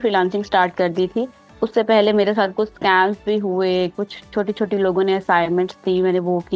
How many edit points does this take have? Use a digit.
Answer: 0